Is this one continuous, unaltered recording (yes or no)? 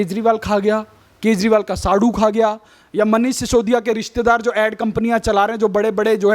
yes